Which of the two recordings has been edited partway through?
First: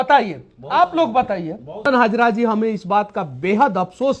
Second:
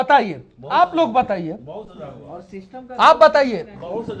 first; 1 cut; at 1.9 s

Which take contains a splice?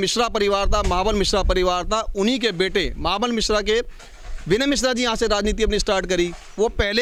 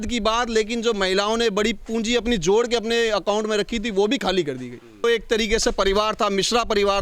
second; 1 cut; at 5.0 s

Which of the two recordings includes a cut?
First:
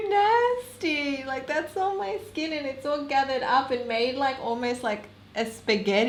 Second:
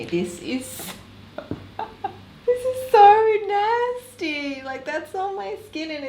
second; 1 cut; at 2.3 s

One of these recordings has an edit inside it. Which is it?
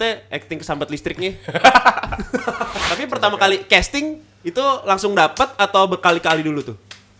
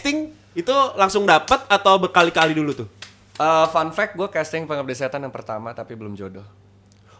first; 1 cut; at 2.9 s

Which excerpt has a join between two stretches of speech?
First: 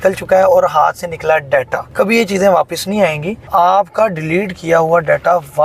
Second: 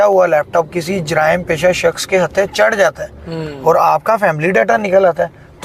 first; 2 cuts; at 1.8 s, 3.5 s

